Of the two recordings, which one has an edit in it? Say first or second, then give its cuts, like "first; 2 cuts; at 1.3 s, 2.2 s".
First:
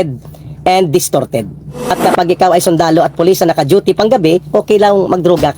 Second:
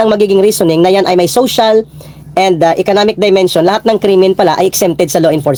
first; 1 cut; at 1.7 s